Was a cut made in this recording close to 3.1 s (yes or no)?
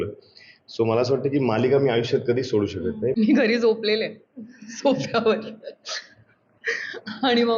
yes